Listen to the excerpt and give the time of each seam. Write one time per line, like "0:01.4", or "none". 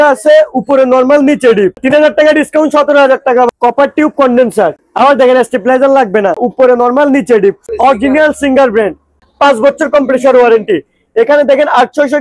0:01.8
0:03.5
0:06.5
0:07.6
0:09.2